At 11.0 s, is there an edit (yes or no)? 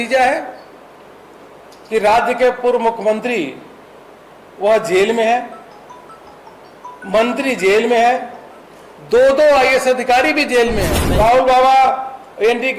yes